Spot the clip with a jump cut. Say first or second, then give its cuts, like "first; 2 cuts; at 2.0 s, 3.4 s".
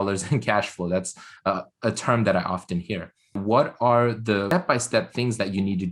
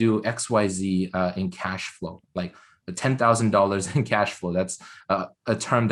first; 2 cuts; at 3.4 s, 4.5 s